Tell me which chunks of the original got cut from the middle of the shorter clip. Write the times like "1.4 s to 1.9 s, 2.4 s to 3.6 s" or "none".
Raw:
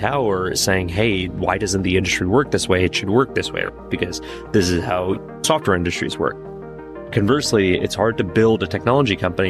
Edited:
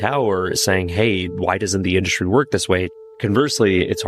2.9 s to 6.9 s